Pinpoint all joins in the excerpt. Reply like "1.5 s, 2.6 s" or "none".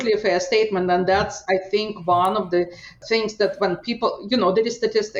none